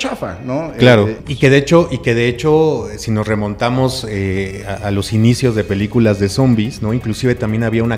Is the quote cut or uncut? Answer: cut